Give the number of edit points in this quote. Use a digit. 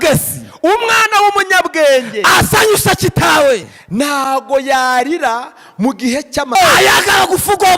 1